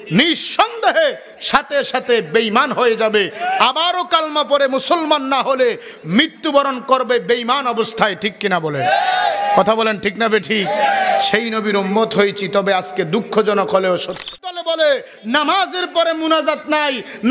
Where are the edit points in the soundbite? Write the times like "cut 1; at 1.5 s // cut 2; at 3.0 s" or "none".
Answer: cut 1; at 14.3 s